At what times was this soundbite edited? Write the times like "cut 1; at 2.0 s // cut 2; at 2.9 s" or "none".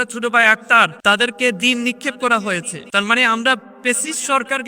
cut 1; at 1.0 s // cut 2; at 2.8 s